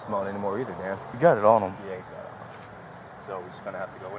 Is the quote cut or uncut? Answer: cut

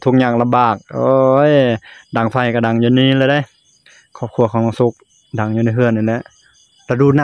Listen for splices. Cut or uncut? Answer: uncut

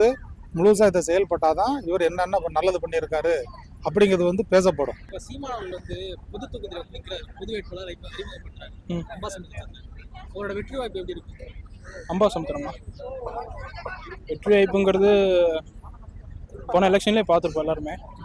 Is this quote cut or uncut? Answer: uncut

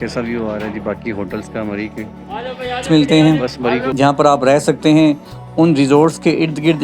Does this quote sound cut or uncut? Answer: cut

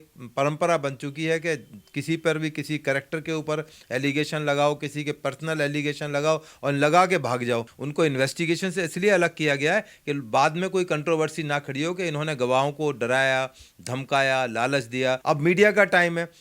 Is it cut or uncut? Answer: cut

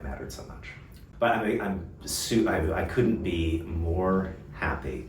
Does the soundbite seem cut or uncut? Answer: cut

